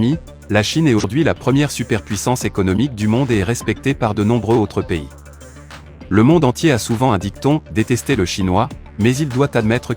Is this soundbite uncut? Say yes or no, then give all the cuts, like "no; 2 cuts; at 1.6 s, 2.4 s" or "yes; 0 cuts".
no; 1 cut; at 1.1 s